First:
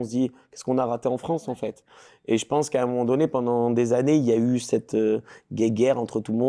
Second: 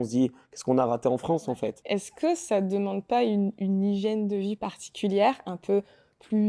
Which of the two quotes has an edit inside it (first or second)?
second